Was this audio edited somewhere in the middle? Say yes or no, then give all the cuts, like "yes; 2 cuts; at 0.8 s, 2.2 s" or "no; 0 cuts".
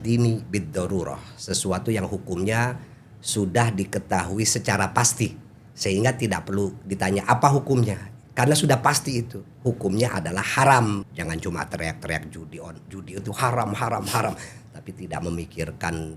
yes; 1 cut; at 11.1 s